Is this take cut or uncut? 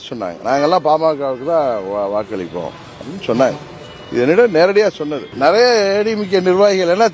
cut